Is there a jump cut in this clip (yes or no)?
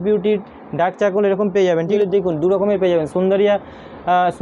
yes